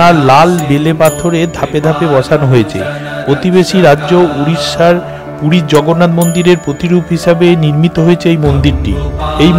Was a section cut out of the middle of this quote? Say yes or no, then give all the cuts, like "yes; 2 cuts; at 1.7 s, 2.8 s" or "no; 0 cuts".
no; 0 cuts